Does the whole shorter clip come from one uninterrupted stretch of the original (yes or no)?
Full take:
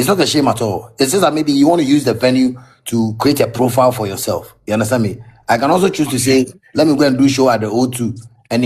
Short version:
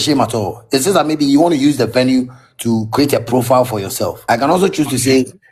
no